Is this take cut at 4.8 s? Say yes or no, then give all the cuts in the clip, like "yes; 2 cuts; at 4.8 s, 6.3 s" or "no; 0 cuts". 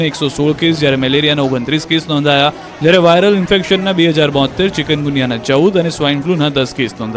yes; 1 cut; at 4.8 s